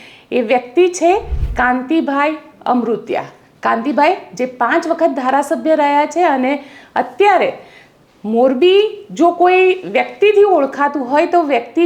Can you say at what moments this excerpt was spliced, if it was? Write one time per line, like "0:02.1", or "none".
none